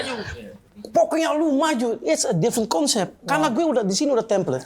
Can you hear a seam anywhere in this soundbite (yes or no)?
no